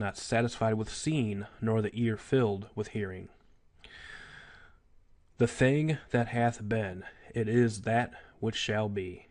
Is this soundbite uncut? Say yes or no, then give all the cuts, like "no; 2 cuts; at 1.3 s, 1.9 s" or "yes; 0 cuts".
yes; 0 cuts